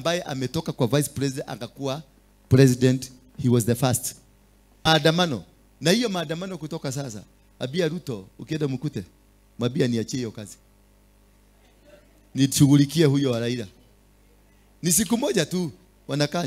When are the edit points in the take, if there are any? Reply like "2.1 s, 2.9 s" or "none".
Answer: 4.9 s